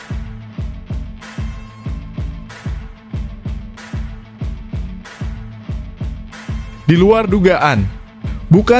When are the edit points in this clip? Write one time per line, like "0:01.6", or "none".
none